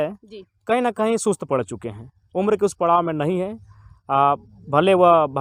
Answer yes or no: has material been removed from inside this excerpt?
no